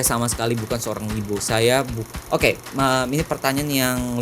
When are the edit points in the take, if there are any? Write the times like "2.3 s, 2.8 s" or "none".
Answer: 2.0 s